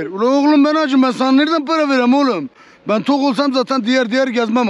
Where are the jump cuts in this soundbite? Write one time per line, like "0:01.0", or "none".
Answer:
none